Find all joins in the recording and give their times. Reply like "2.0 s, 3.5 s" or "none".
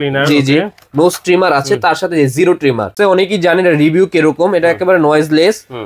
2.9 s